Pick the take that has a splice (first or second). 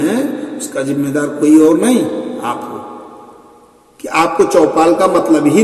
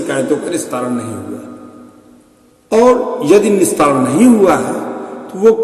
first